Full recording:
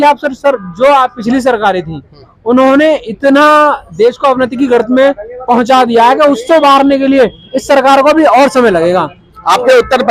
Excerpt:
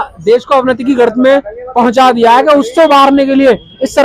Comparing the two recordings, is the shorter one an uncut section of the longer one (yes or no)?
yes